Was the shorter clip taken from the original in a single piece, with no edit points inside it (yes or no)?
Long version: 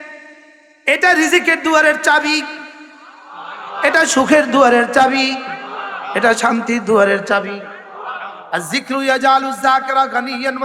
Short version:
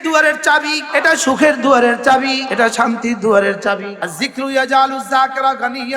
no